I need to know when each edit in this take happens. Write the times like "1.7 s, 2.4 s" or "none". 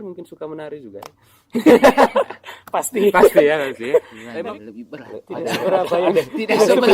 4.2 s